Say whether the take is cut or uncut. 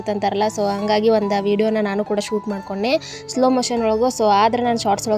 uncut